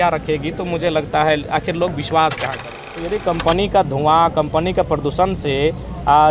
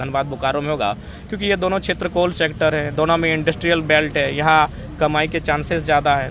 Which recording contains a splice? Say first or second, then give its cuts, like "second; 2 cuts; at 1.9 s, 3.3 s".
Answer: first; 1 cut; at 3.1 s